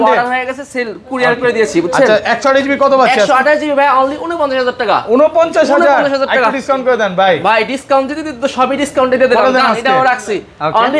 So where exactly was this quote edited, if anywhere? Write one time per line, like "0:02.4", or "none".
none